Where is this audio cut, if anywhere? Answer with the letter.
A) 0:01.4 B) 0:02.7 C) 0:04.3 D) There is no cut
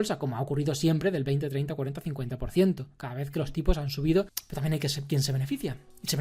C